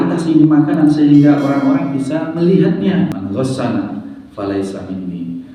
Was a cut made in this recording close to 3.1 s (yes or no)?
yes